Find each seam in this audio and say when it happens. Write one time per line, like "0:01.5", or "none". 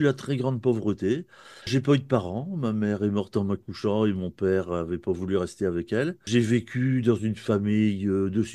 0:01.7
0:06.3